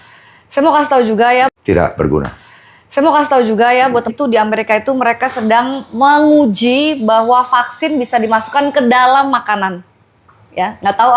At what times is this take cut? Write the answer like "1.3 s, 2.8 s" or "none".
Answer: 1.5 s, 3.9 s